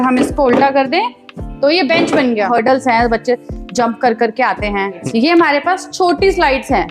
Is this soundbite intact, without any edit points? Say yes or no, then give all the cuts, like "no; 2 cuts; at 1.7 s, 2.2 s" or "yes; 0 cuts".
no; 2 cuts; at 2.5 s, 5.0 s